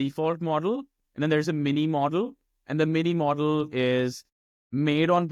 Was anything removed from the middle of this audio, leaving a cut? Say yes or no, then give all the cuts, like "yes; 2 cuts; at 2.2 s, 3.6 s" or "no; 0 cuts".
no; 0 cuts